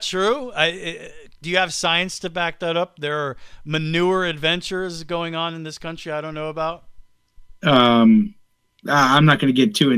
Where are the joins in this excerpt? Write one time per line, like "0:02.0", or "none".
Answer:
none